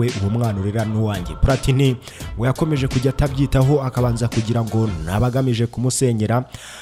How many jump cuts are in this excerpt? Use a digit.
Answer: 0